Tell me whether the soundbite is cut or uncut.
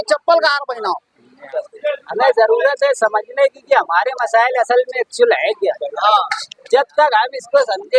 cut